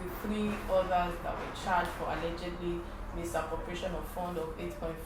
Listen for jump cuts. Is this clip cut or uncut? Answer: uncut